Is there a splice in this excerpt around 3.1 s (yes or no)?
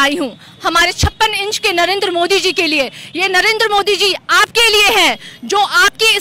no